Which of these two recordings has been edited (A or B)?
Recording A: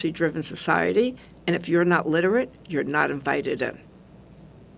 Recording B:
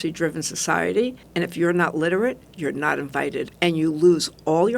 B